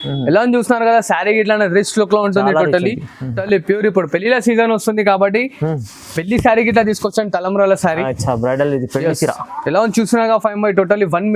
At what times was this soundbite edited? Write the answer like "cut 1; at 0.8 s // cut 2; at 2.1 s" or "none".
cut 1; at 3.4 s